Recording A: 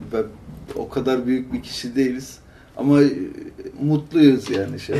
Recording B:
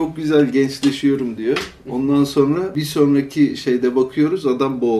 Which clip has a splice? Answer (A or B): B